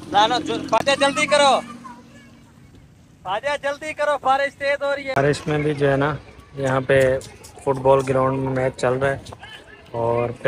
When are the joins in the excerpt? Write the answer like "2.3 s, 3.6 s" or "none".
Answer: 5.2 s